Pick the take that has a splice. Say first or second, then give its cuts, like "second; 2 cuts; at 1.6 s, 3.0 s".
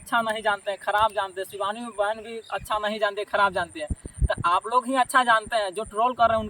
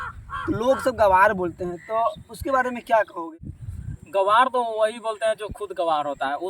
second; 1 cut; at 3.4 s